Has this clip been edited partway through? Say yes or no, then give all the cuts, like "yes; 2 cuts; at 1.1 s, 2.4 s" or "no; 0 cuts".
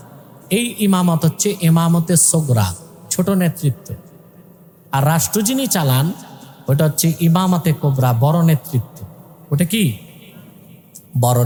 no; 0 cuts